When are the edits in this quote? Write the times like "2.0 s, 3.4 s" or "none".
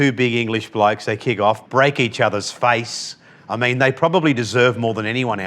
1.6 s